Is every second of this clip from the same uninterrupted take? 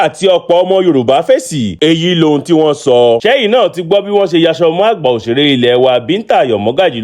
no; 1 cut; at 3.2 s

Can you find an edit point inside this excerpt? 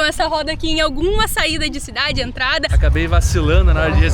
yes; 1 cut; at 2.8 s

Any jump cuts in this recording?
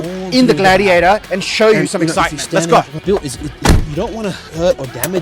yes; 1 cut; at 3.0 s

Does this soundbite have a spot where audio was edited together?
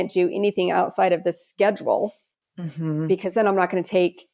no; 0 cuts

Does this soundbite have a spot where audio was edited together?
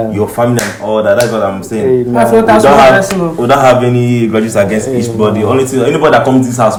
no; 0 cuts

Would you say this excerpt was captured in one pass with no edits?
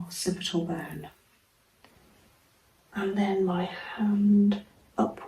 no; 1 cut; at 1.9 s

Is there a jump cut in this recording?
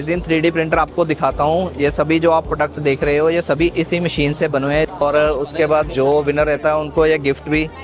yes; 1 cut; at 4.9 s

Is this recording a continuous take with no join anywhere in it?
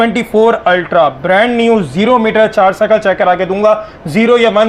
yes; 0 cuts

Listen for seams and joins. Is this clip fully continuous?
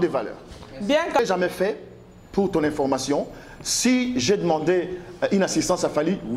no; 1 cut; at 1.2 s

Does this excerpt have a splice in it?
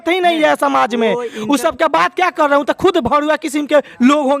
no; 0 cuts

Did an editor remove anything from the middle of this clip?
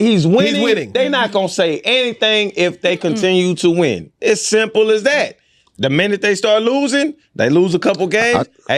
no; 0 cuts

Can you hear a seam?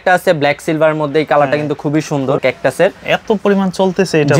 yes; 1 cut; at 2.4 s

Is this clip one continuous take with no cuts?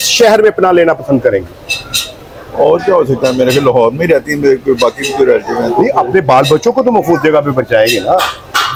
yes; 0 cuts

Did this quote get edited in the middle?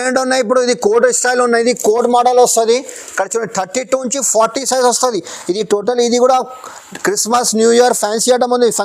no; 0 cuts

